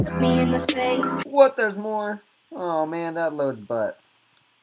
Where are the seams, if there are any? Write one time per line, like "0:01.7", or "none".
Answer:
0:01.2

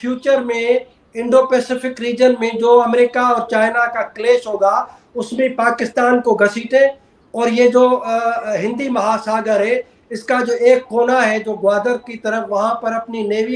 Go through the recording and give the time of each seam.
none

